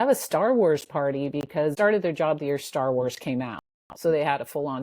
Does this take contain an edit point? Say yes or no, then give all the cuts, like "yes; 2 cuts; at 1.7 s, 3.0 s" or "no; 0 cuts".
yes; 1 cut; at 1.7 s